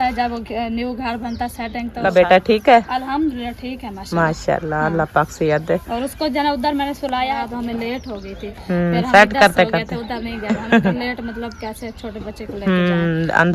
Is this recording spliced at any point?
yes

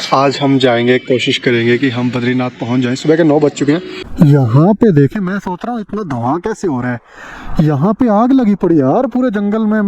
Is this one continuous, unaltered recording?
no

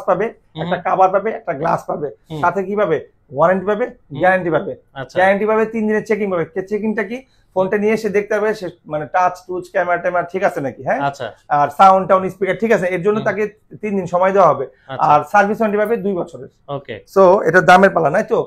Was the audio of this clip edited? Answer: no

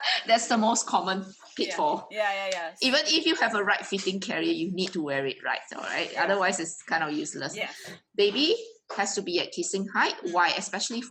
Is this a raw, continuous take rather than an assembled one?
yes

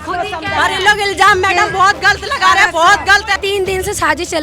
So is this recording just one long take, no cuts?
no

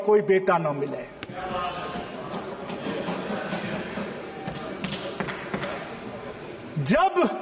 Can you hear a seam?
no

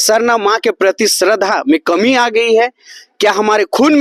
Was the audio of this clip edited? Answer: no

